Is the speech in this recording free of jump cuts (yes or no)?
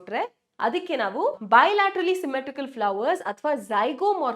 no